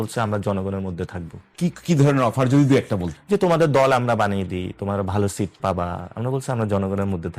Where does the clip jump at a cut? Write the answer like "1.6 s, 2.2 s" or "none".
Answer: 3.1 s